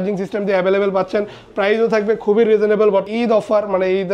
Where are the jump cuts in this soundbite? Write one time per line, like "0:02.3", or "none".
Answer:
0:03.1